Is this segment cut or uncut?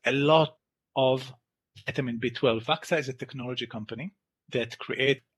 cut